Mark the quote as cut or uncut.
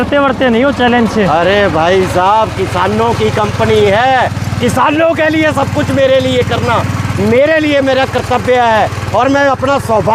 uncut